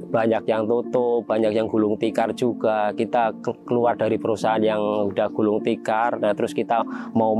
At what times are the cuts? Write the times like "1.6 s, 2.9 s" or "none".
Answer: none